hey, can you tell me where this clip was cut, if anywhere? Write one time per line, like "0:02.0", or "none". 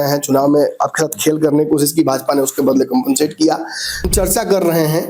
0:04.1